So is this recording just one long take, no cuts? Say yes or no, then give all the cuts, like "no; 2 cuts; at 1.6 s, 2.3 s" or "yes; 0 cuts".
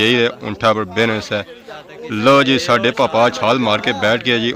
yes; 0 cuts